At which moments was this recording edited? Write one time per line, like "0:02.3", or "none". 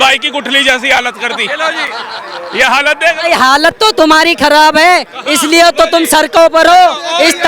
none